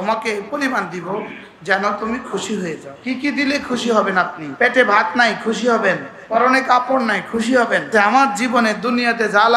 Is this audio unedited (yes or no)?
no